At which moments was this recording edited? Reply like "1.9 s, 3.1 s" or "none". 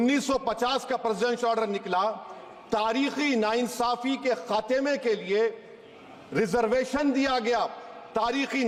none